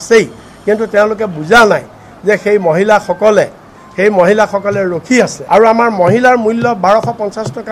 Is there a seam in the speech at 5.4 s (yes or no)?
yes